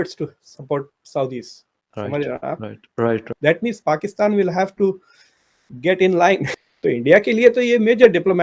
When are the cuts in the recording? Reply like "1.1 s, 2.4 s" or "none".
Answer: 3.3 s, 6.5 s